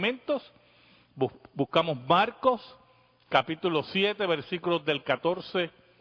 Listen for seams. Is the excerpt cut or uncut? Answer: cut